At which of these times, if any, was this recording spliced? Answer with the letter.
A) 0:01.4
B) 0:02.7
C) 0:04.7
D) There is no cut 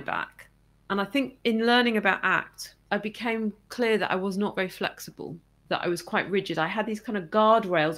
B